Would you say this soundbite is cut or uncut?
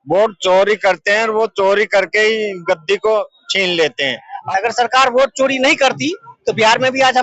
cut